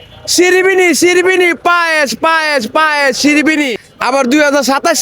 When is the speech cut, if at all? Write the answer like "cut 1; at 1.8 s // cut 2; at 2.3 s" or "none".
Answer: cut 1; at 3.8 s